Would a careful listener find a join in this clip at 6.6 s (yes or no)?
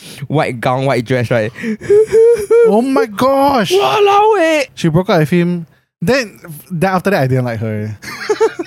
no